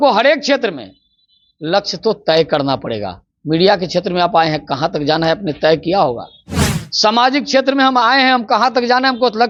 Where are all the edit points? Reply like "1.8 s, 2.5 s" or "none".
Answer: none